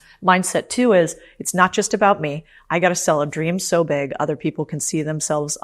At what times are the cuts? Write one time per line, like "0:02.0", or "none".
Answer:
none